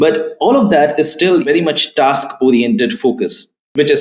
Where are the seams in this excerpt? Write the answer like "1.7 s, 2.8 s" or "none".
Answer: 1.4 s